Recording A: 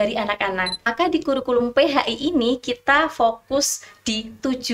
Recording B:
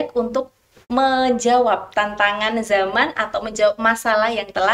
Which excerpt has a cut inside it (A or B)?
A